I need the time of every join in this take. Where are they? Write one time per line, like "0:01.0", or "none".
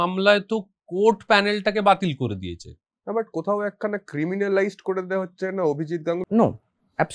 0:02.9
0:06.2

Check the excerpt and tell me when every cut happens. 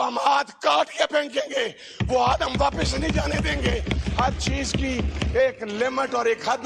none

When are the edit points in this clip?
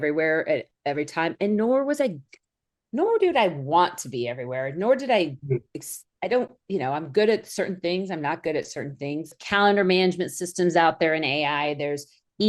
0:09.4

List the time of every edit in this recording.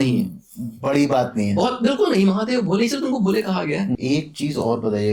0:03.9

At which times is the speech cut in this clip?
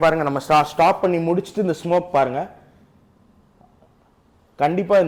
none

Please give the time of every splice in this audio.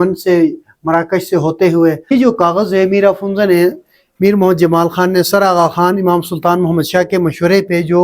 0:02.1

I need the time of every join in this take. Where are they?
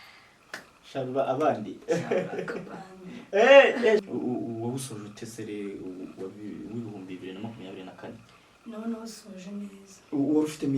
0:04.0

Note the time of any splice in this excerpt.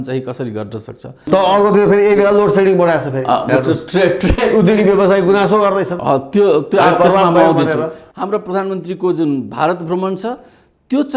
0:01.2
0:08.0

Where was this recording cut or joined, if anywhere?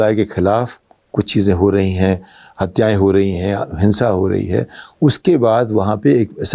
none

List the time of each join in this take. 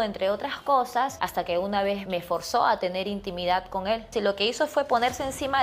0:01.2
0:02.0
0:04.0

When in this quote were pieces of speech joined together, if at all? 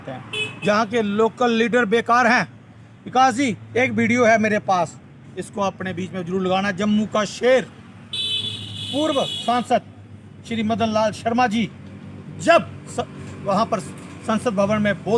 0:07.0

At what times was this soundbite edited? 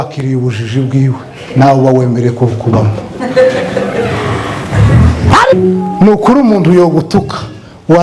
0:05.5

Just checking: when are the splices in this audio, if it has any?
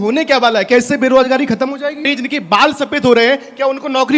0:02.1

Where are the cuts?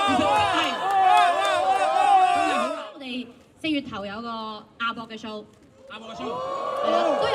0:02.8

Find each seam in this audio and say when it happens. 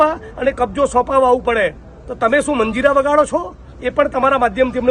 none

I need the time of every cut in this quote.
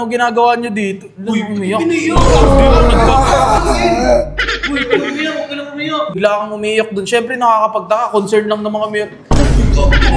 0:06.2

